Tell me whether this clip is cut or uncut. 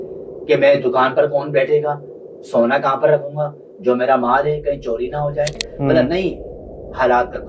cut